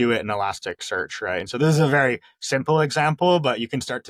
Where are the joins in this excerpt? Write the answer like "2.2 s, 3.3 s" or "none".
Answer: none